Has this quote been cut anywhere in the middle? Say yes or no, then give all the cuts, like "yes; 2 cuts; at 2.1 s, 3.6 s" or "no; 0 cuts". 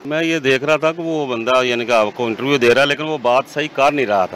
no; 0 cuts